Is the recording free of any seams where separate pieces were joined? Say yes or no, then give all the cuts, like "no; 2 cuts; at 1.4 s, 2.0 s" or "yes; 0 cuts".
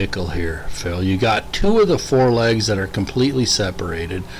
yes; 0 cuts